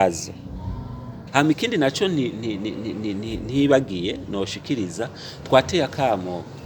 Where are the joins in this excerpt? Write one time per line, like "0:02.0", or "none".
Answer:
0:01.1